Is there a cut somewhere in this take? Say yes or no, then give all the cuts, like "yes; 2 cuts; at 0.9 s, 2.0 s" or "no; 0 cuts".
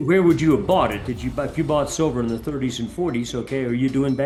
no; 0 cuts